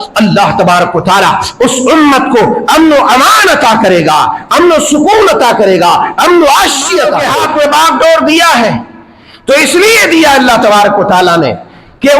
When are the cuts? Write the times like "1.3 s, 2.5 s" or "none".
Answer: 7.3 s